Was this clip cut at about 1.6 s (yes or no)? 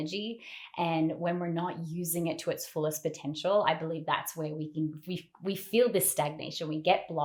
no